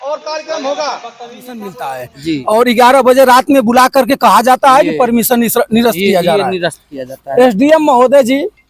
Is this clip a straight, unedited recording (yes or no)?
no